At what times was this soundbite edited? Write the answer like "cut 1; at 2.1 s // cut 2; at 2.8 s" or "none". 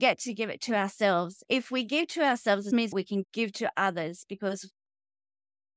cut 1; at 1.4 s // cut 2; at 2.8 s